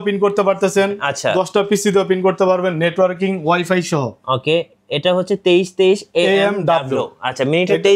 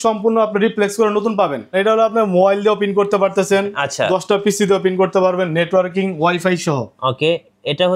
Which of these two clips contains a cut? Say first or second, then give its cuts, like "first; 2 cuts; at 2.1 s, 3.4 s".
second; 1 cut; at 1.6 s